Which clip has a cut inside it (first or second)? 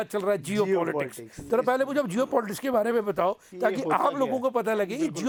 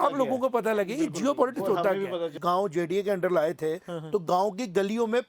second